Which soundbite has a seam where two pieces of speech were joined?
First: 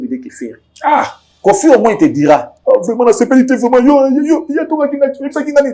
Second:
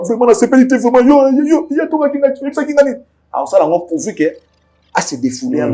first; 1 cut; at 1.2 s

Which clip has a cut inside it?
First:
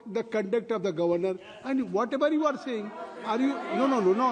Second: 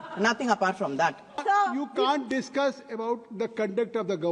second; 1 cut; at 1.4 s

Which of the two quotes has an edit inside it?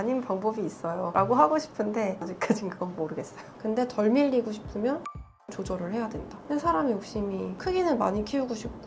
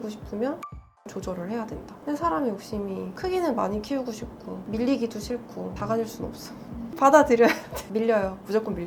first; 1 cut; at 3.5 s

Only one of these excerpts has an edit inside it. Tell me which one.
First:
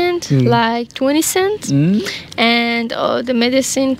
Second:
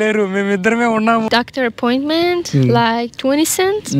second; 1 cut; at 1.3 s

